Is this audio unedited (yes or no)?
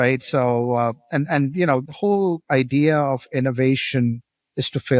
no